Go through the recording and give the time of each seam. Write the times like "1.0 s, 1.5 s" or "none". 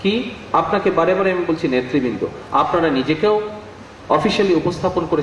none